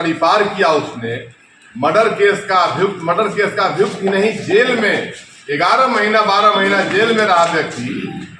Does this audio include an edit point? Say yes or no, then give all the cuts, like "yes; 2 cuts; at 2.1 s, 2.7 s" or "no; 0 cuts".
no; 0 cuts